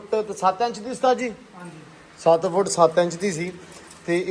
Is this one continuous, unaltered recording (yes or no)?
yes